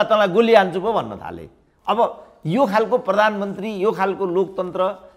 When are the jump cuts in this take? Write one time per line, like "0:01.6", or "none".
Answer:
none